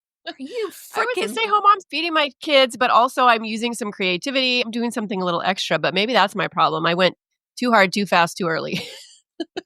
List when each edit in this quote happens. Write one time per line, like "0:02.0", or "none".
0:01.9
0:04.7

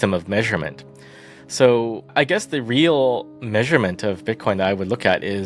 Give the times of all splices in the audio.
0:02.1

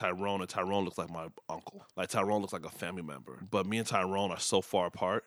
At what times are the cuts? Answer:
none

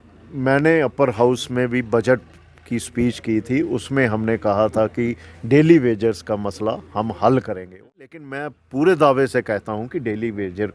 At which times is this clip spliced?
0:07.8

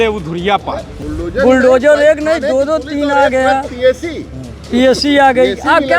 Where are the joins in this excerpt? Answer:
0:01.0

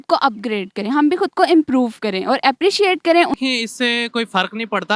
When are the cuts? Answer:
0:03.3

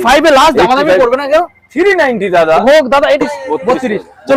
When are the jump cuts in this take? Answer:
0:03.2

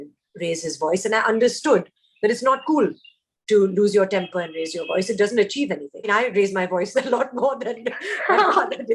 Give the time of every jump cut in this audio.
0:06.1

